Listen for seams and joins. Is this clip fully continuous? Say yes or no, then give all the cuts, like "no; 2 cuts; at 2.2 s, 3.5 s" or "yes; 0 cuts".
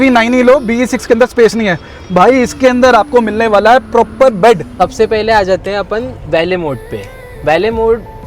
no; 1 cut; at 4.7 s